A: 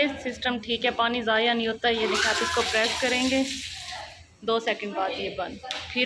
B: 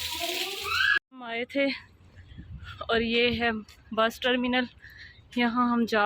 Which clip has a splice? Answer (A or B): B